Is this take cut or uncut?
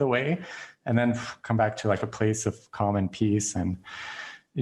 uncut